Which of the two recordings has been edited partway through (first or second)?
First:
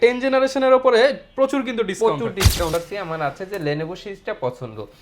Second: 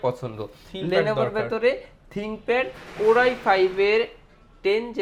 first